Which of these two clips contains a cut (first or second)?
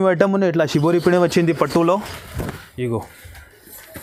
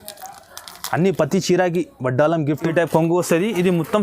second